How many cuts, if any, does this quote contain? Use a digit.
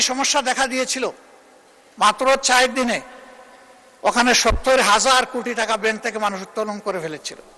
0